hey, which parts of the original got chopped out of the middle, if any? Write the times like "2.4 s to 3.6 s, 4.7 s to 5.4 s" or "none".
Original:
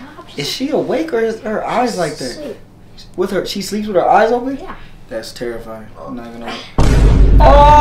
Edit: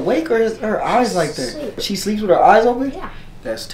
2.7 s to 3.5 s